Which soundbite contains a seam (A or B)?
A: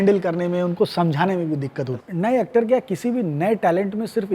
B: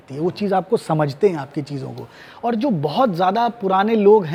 A